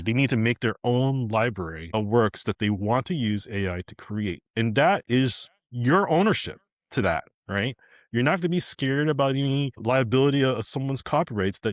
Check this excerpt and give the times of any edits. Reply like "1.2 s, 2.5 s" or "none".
1.8 s, 9.8 s